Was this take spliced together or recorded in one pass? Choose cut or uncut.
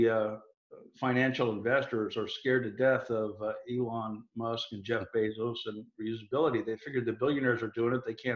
uncut